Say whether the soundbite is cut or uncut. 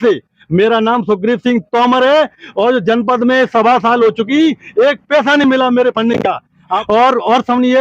cut